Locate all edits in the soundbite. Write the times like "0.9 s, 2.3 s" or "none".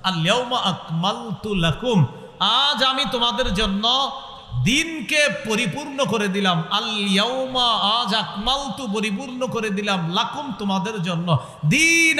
none